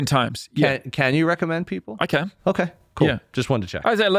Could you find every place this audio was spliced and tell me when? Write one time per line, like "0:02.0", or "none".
none